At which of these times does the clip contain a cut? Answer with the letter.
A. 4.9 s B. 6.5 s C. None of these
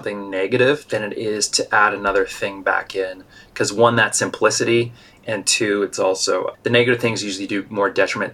B